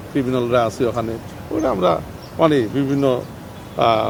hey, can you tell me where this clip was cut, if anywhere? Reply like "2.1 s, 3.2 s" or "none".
none